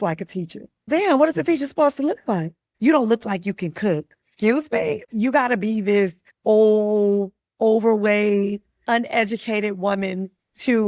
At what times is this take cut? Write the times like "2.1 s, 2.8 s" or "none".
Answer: none